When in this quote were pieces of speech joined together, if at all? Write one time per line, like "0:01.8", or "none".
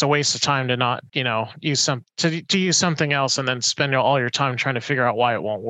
0:01.1